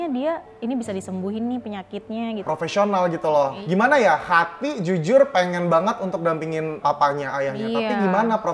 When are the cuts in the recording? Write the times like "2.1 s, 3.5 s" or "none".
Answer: 2.4 s, 3.6 s, 6.8 s